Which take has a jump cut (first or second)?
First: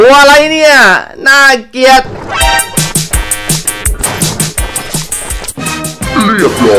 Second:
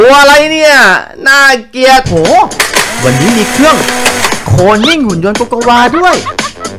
second